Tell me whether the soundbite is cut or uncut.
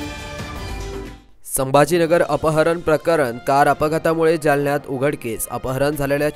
cut